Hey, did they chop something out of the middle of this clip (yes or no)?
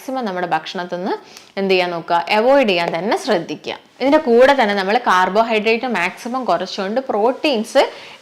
no